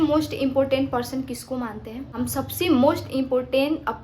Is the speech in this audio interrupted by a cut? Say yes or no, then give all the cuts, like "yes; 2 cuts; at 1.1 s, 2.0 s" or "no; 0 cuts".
yes; 1 cut; at 2.1 s